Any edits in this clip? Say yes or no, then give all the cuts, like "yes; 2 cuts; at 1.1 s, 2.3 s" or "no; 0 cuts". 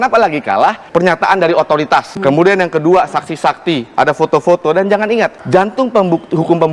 yes; 3 cuts; at 0.8 s, 2.1 s, 5.4 s